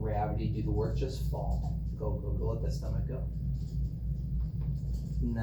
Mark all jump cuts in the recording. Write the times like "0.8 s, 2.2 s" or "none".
none